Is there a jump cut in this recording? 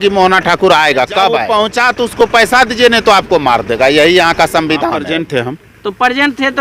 yes; 2 cuts; at 1.4 s, 5.1 s

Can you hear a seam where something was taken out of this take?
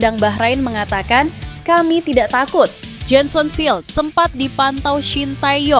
yes; 1 cut; at 2.9 s

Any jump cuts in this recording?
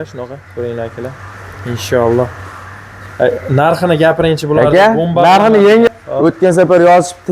yes; 1 cut; at 5.9 s

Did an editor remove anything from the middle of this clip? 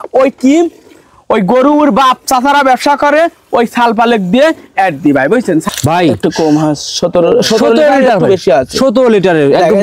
yes; 1 cut; at 5.7 s

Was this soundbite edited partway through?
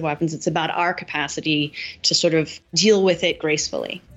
yes; 1 cut; at 2.6 s

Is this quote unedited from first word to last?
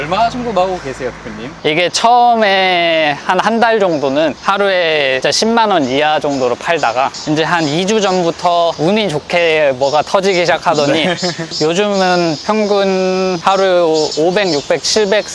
yes; 0 cuts

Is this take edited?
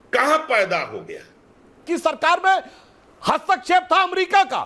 yes; 1 cut; at 1.8 s

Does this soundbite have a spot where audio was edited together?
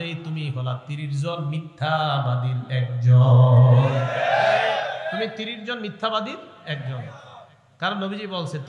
no; 0 cuts

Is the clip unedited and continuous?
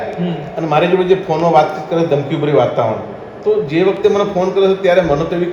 yes; 0 cuts

